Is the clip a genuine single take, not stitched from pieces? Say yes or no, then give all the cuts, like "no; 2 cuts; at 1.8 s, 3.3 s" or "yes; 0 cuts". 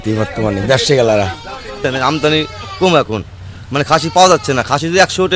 no; 1 cut; at 1.8 s